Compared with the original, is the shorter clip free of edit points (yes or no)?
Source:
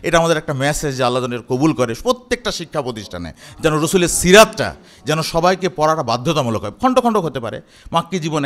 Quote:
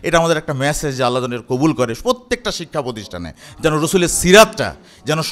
yes